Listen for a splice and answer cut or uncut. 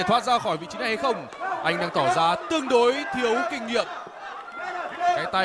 uncut